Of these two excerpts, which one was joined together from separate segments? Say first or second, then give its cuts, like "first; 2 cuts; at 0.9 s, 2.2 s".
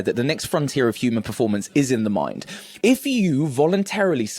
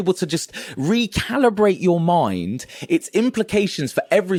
first; 1 cut; at 2.6 s